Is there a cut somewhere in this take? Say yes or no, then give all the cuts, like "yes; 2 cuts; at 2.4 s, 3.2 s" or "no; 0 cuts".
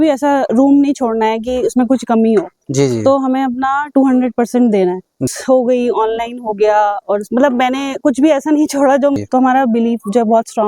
yes; 2 cuts; at 5.2 s, 9.2 s